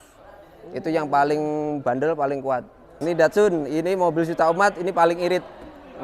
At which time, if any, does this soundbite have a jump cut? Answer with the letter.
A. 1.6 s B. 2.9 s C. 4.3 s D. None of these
B